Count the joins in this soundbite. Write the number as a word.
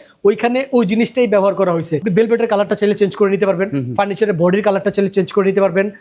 one